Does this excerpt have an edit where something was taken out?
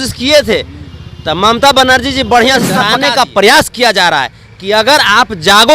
yes; 1 cut; at 2.9 s

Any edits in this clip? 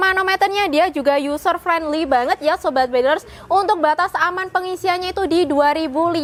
no; 0 cuts

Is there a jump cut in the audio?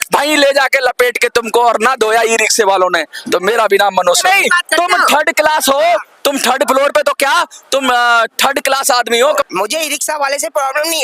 yes; 2 cuts; at 4.2 s, 9.2 s

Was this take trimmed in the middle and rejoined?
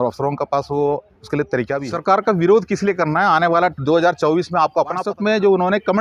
yes; 2 cuts; at 1.9 s, 5.0 s

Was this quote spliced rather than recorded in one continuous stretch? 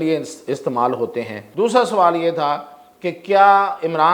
yes; 1 cut; at 1.4 s

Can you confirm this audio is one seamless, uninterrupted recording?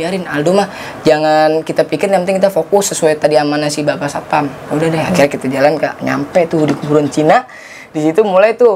yes; 0 cuts

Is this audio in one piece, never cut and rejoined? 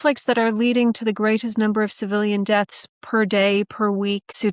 yes; 0 cuts

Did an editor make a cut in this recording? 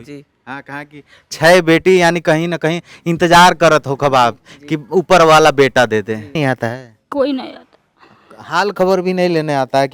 yes; 1 cut; at 6.3 s

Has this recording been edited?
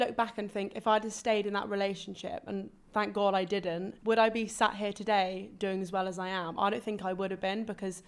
no; 0 cuts

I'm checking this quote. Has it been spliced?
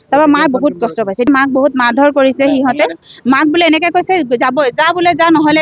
yes; 2 cuts; at 1.3 s, 3.1 s

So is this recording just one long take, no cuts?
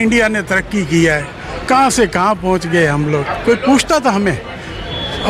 yes; 0 cuts

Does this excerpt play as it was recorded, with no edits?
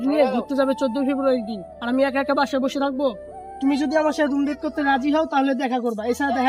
yes; 0 cuts

